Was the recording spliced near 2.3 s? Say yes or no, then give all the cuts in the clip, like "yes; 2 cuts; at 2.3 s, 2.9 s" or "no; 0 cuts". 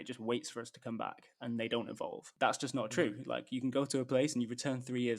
yes; 1 cut; at 2.3 s